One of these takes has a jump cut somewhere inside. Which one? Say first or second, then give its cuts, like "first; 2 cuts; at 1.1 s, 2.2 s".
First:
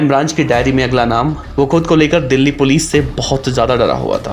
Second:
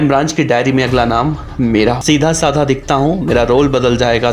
second; 1 cut; at 1.4 s